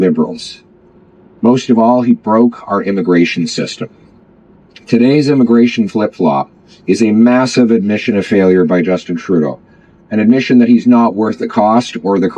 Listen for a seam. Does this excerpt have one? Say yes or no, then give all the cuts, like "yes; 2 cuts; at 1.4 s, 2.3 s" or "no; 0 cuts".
no; 0 cuts